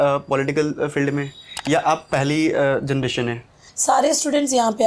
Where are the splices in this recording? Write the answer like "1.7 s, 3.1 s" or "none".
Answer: 3.6 s